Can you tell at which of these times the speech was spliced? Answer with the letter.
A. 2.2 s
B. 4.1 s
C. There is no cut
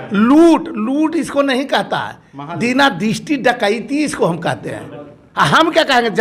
C